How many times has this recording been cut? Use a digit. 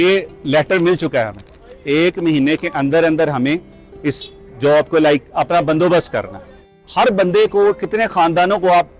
1